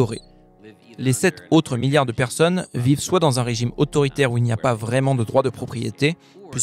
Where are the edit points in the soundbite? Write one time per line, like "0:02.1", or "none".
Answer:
none